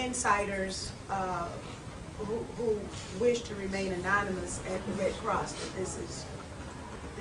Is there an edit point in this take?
yes; 1 cut; at 4.8 s

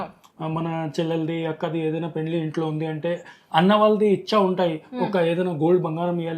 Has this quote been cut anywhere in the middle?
no; 0 cuts

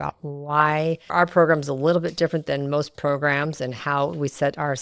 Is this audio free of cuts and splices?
yes; 0 cuts

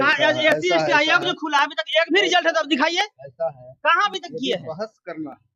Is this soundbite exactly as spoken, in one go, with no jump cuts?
yes; 0 cuts

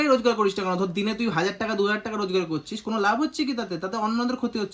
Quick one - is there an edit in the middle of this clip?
no; 0 cuts

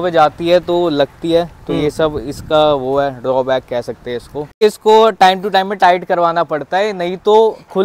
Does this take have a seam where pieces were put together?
yes; 1 cut; at 4.5 s

